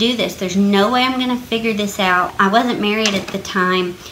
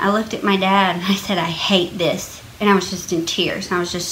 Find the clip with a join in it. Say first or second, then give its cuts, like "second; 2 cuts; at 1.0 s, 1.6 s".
first; 1 cut; at 2.3 s